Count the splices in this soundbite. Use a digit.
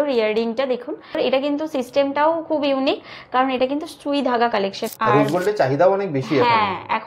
2